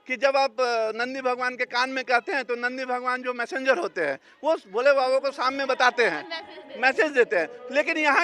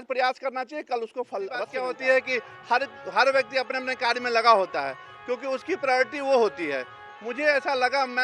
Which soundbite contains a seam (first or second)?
second